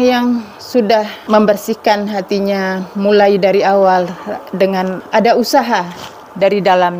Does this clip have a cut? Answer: yes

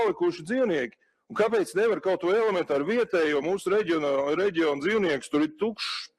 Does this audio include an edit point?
no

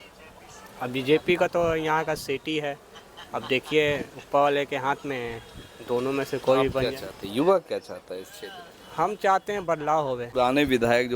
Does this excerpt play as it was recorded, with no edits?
no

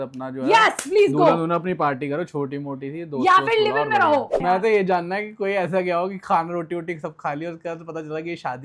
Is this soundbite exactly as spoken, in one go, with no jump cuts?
no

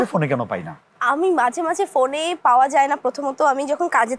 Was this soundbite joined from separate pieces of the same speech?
no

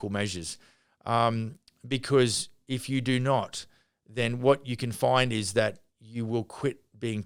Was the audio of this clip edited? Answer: no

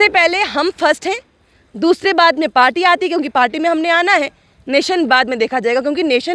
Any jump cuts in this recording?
no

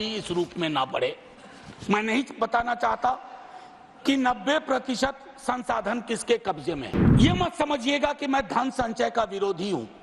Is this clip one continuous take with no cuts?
no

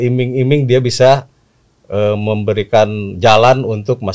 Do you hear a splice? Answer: no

